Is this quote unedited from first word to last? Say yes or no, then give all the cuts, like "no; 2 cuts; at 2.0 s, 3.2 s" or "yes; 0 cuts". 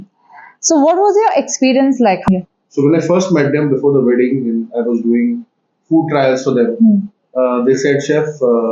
no; 1 cut; at 2.3 s